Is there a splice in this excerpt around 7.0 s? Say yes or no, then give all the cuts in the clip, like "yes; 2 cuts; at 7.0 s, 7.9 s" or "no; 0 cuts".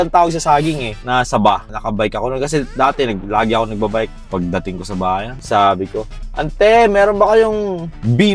no; 4 cuts; at 0.9 s, 1.7 s, 4.2 s, 5.3 s